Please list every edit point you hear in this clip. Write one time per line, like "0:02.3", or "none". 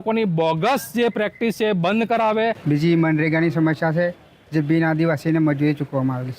0:02.6

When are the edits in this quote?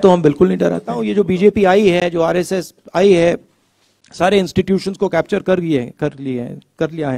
0:01.0

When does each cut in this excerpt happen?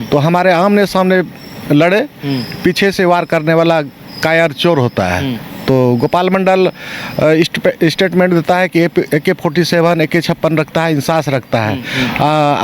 none

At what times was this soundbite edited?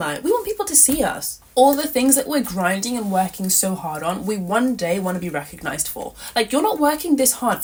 none

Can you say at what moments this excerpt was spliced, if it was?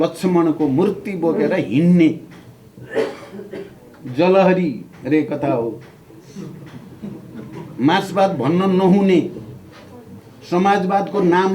none

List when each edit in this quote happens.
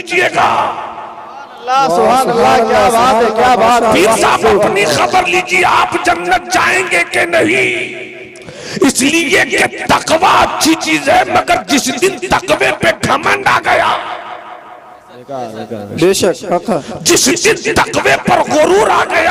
none

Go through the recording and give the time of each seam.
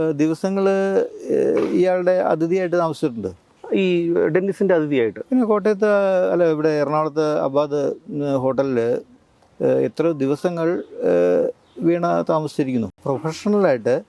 0:13.0

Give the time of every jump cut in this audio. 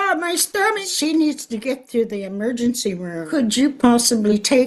0:00.9
0:03.4

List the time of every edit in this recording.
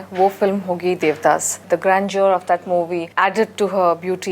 0:01.5
0:03.1

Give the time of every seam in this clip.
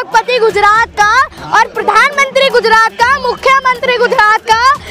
none

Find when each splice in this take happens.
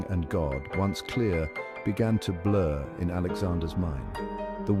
none

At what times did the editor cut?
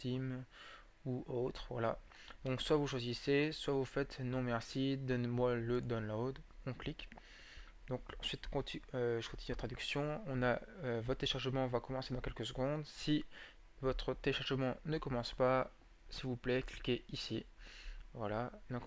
0:12.1

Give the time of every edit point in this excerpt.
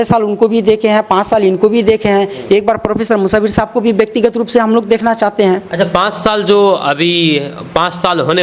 none

